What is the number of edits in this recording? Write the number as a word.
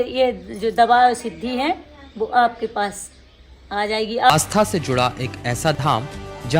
one